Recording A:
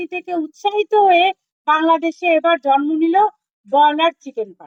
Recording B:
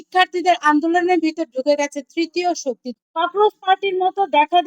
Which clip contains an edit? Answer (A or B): B